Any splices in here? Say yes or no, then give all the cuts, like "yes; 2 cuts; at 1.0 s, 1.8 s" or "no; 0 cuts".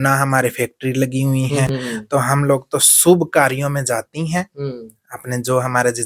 no; 0 cuts